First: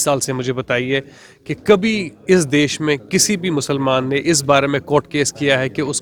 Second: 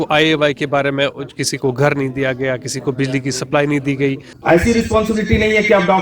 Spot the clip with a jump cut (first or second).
second